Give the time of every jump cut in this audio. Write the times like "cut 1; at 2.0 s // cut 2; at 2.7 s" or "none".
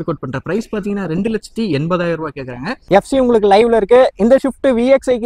cut 1; at 2.9 s